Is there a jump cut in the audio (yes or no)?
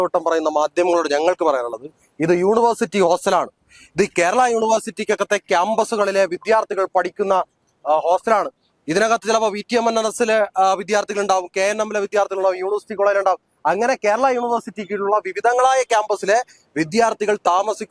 no